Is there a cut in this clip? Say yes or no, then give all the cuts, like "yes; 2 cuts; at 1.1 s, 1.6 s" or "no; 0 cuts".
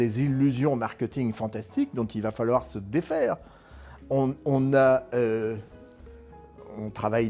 no; 0 cuts